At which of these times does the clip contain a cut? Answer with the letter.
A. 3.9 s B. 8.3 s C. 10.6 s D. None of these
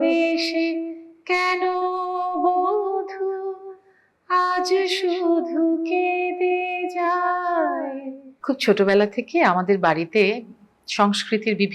B